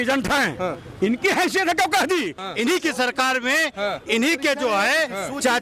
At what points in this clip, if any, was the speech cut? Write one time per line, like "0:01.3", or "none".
0:02.4